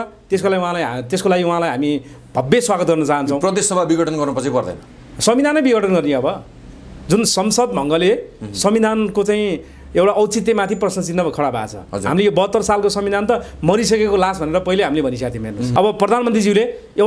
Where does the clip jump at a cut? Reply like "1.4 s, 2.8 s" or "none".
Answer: 15.7 s